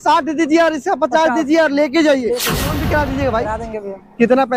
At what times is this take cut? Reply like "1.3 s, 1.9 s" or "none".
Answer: 2.7 s